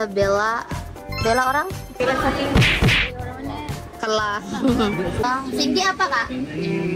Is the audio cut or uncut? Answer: cut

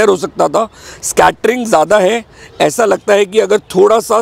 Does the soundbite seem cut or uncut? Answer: uncut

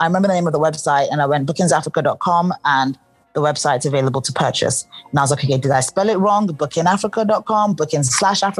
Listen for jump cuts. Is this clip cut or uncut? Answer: uncut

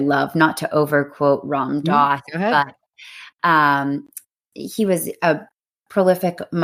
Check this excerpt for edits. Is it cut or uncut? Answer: uncut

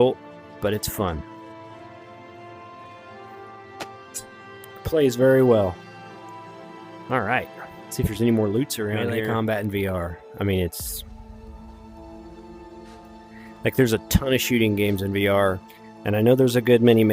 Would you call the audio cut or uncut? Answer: cut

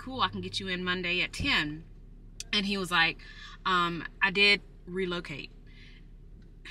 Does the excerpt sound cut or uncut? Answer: uncut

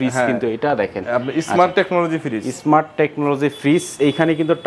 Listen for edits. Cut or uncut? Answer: uncut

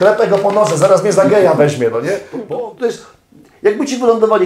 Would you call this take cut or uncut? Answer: cut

